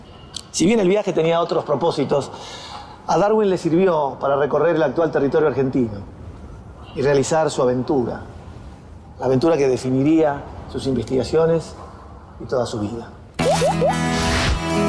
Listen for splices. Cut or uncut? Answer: cut